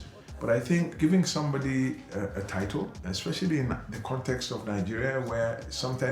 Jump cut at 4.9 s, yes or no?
no